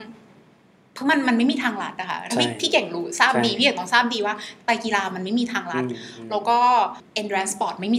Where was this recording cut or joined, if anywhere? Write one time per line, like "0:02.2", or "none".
0:07.0